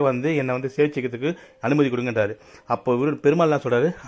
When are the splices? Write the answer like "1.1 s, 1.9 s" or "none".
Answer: none